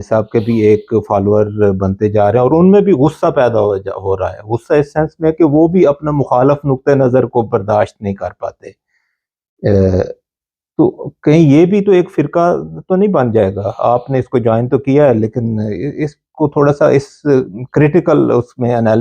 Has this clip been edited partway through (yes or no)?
no